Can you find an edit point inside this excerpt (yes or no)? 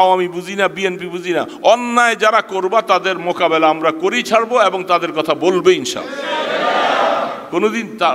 no